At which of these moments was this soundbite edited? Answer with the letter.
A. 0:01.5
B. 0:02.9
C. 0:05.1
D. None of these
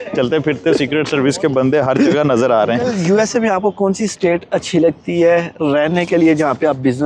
B